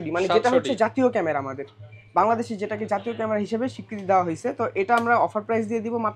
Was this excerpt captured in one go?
yes; 0 cuts

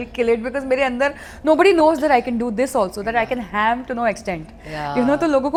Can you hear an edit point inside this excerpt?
no; 0 cuts

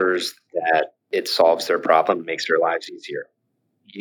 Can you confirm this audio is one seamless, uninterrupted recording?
no; 1 cut; at 1.0 s

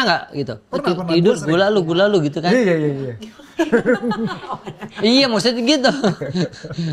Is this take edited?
no; 0 cuts

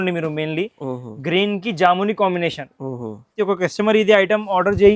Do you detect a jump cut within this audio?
yes; 1 cut; at 3.4 s

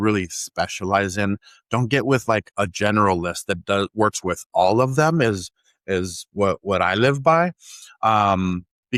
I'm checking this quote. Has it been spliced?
no; 0 cuts

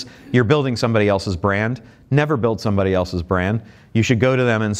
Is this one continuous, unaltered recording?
yes; 0 cuts

